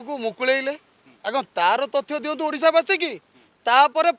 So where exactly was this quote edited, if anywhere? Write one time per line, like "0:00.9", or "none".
none